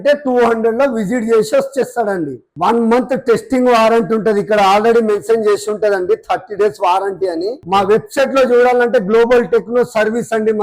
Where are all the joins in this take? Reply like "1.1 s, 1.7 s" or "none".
2.4 s, 7.5 s